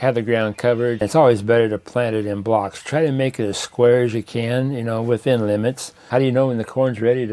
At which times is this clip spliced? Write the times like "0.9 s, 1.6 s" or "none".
1.1 s, 6.1 s